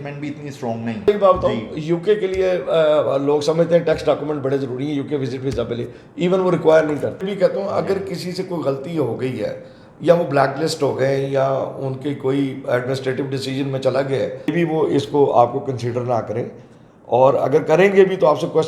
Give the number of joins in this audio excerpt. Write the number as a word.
three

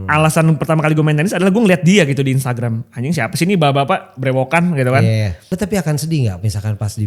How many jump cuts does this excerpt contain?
one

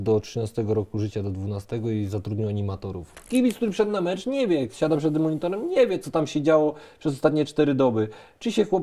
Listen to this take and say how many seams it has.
one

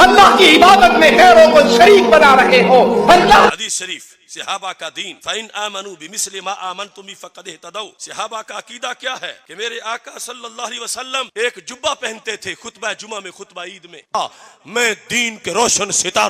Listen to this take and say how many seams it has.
two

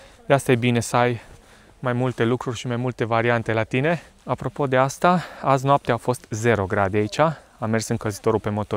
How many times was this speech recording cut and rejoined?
one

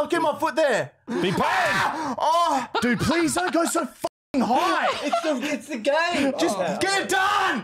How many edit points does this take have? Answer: two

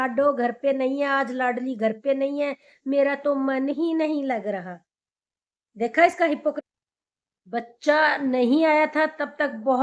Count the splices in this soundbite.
one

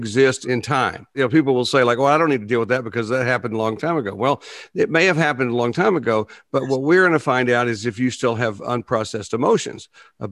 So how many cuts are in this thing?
one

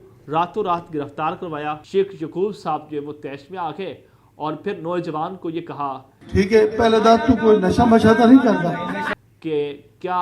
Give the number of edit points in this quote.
three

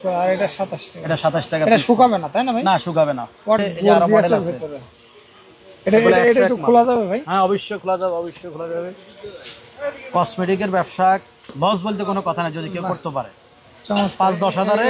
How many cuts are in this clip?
one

